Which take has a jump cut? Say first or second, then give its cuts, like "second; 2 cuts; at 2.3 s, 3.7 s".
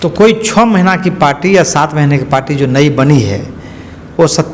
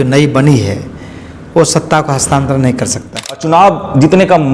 second; 1 cut; at 3.4 s